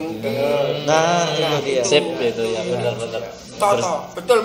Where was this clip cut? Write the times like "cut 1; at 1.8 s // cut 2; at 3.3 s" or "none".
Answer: none